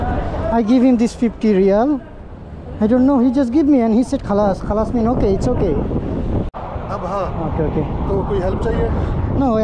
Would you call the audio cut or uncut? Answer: cut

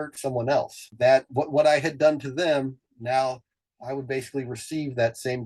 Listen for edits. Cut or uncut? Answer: uncut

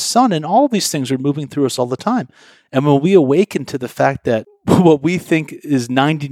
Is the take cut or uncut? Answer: cut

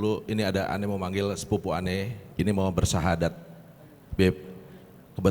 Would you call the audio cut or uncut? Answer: cut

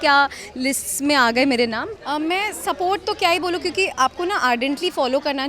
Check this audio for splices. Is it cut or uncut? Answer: cut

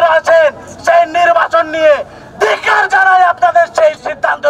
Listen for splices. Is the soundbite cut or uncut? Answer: uncut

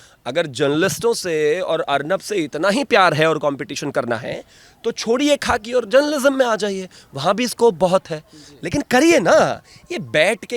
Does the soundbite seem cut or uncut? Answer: uncut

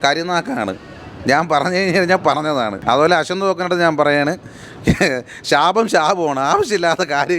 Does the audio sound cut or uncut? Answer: cut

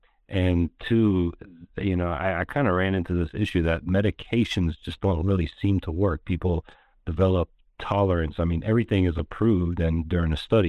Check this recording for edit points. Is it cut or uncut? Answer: uncut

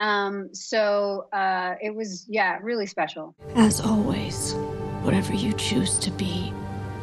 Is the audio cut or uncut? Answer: cut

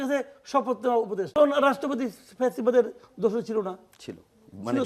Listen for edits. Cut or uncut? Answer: cut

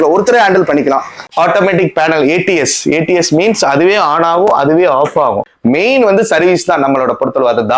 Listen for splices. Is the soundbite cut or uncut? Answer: cut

